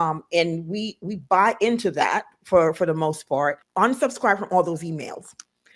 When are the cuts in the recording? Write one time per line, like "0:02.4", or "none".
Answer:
0:03.6